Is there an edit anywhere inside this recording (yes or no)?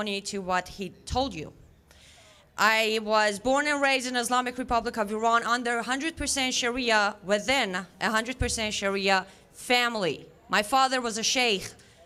no